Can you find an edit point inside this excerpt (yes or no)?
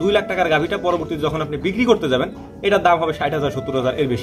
no